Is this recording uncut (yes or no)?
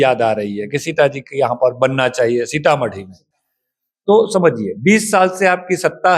yes